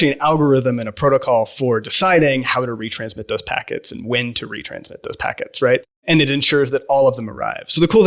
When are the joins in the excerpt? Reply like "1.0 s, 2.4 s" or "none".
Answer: none